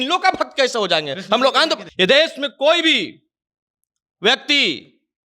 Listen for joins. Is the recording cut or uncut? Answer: cut